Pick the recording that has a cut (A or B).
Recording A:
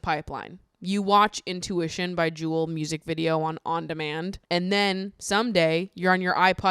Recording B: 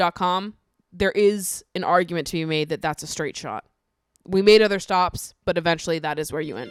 A